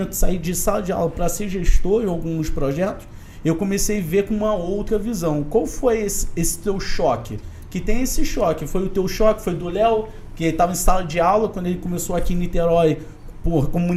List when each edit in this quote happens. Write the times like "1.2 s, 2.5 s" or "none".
none